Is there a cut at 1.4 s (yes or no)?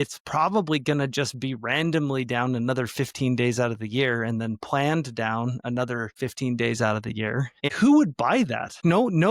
no